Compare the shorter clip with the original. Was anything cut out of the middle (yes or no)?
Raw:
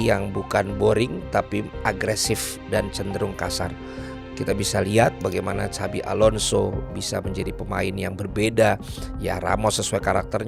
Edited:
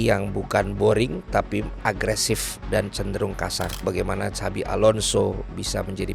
yes